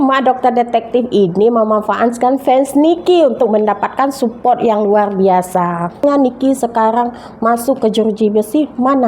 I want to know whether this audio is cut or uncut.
cut